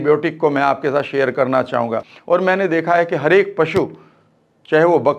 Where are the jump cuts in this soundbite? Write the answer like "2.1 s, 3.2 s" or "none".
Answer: 2.1 s